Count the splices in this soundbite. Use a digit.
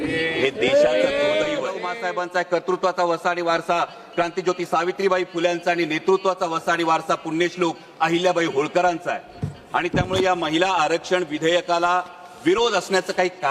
1